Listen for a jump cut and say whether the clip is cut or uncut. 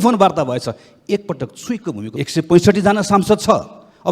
cut